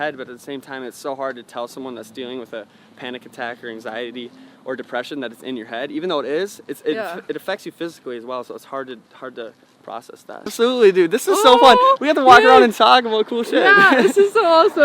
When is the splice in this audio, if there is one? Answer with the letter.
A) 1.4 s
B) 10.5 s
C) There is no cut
B